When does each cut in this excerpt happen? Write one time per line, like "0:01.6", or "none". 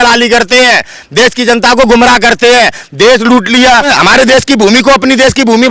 0:03.9